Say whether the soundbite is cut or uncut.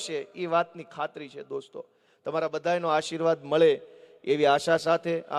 uncut